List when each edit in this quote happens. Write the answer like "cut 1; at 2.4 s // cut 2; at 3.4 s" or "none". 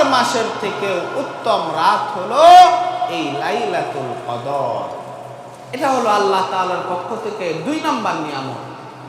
none

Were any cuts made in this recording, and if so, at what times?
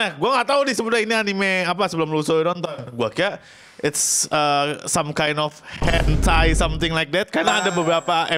none

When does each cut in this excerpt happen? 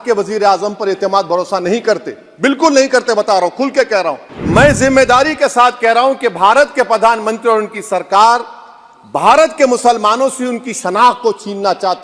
cut 1; at 4.3 s

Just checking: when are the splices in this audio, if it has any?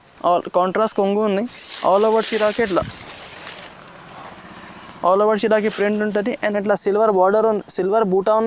none

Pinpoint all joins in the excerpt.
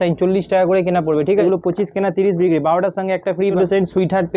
cut 1; at 1.4 s // cut 2; at 3.5 s

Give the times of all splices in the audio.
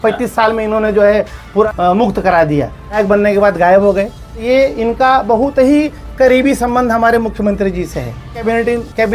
cut 1; at 1.7 s // cut 2; at 3.0 s // cut 3; at 4.4 s // cut 4; at 8.4 s

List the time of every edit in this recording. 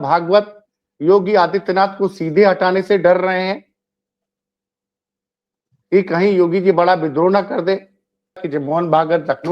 cut 1; at 8.4 s

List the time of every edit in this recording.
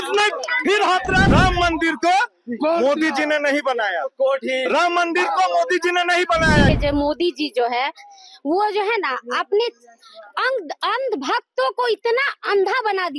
cut 1; at 1.3 s // cut 2; at 6.7 s

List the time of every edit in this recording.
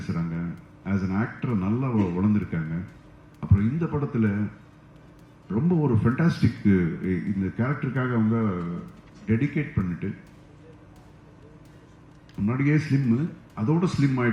none

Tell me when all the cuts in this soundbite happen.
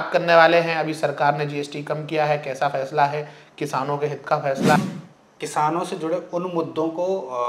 cut 1; at 4.8 s

